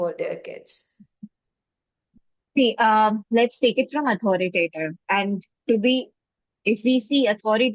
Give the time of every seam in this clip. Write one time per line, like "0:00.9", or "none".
none

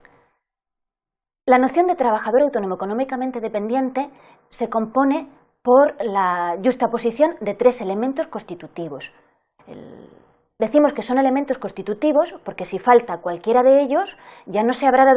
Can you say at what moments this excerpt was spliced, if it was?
0:08.1

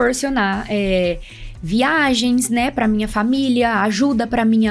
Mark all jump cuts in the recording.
none

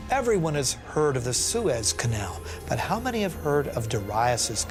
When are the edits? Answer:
none

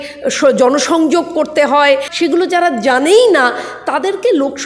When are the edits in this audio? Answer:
0:02.1

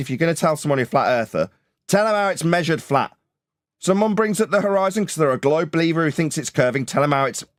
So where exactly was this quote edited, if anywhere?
none

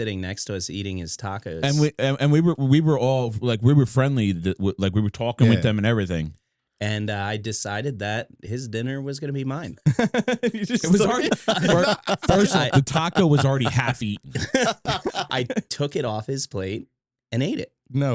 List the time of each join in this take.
none

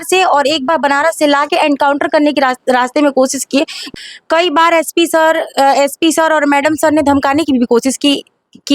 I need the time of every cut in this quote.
0:03.8

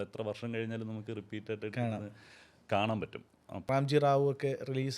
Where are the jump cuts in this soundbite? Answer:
0:03.6

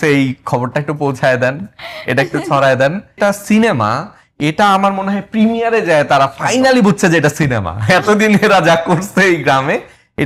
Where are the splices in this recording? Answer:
0:03.2

